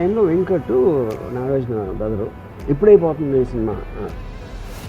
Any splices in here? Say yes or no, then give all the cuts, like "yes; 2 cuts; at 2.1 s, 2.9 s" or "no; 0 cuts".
yes; 1 cut; at 2.5 s